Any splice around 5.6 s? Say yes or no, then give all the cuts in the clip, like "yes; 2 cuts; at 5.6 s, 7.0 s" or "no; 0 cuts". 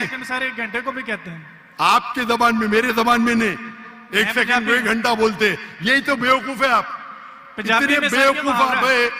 no; 0 cuts